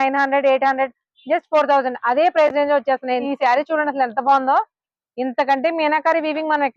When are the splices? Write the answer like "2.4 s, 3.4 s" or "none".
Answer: 3.2 s